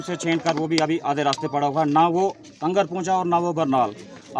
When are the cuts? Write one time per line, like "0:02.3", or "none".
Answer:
none